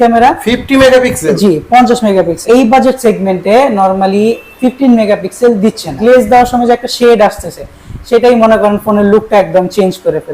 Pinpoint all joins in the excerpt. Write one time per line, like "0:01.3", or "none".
0:02.4
0:06.0